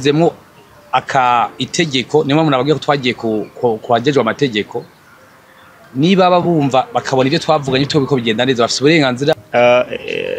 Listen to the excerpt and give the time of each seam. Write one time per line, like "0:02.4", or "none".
0:09.4